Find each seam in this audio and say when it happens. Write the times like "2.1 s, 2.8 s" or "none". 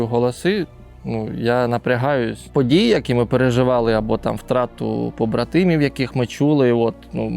2.4 s